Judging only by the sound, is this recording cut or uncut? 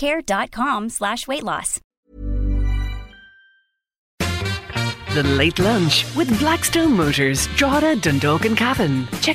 cut